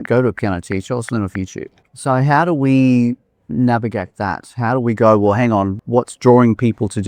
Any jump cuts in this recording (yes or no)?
yes